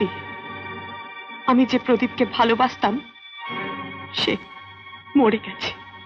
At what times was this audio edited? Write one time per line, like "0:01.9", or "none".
none